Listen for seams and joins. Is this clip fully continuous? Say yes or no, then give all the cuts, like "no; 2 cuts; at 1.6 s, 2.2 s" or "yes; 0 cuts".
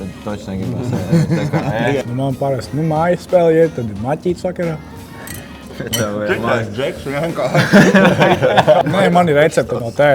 no; 2 cuts; at 2.1 s, 8.8 s